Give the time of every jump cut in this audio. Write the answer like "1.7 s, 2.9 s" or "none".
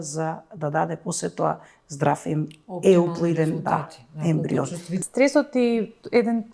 4.9 s

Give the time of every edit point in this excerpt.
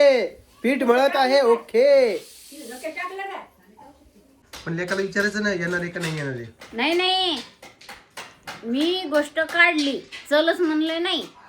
4.3 s

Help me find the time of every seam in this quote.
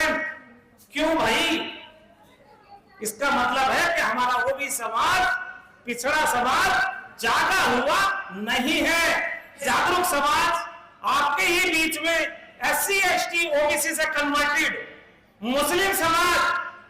9.6 s

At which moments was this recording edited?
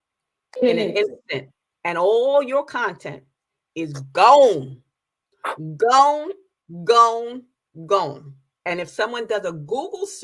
8.6 s

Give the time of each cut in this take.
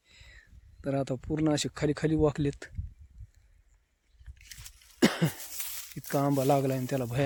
none

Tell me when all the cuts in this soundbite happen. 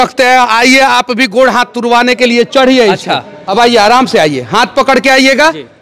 3.3 s

